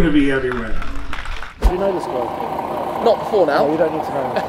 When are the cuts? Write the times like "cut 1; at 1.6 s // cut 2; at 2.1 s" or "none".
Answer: cut 1; at 1.6 s